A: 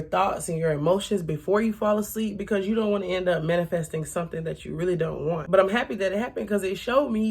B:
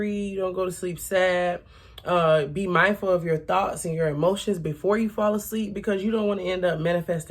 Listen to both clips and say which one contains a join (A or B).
A